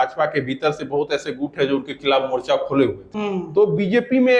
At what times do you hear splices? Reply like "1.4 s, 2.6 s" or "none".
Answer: 3.1 s